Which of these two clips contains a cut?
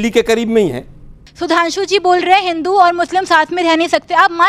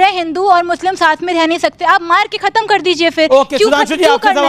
first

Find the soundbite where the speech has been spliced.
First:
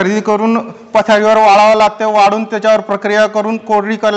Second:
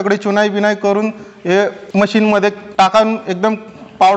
second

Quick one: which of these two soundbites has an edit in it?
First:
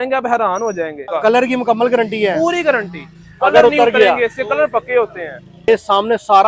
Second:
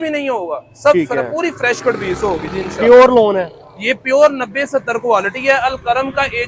first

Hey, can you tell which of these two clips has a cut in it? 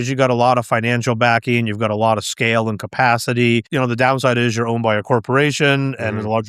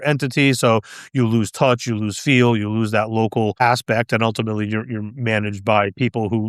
first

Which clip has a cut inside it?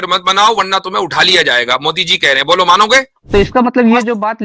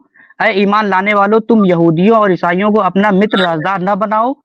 first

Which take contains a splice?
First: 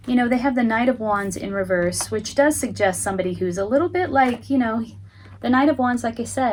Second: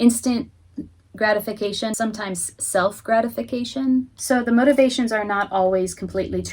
second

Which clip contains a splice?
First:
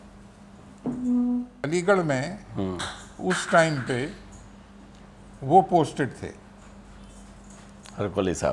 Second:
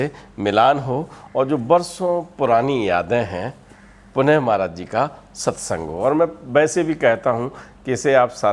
first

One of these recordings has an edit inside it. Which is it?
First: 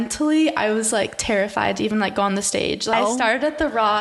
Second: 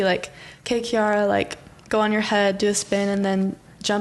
first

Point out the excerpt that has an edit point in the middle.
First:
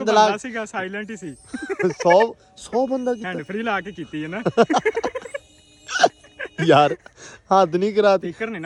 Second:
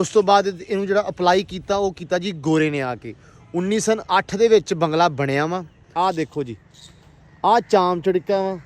second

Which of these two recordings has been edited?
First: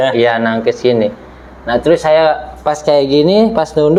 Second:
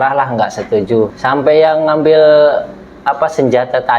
second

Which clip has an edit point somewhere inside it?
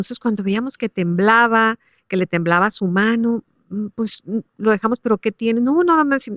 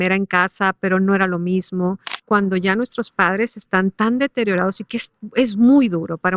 second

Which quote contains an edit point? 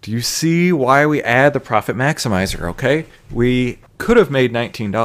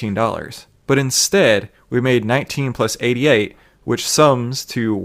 first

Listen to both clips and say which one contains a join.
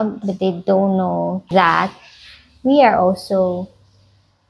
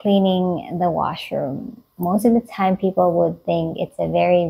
first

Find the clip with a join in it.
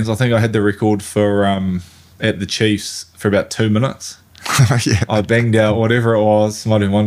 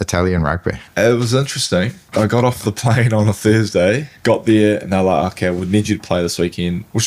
second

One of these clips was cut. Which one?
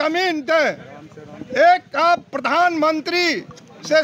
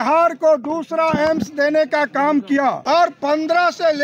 second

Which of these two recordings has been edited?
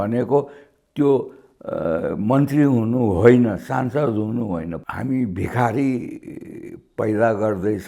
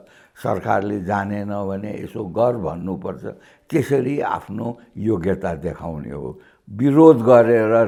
first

